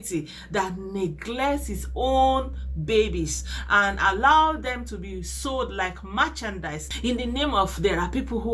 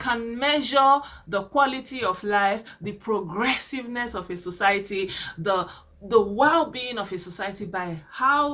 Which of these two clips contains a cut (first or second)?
first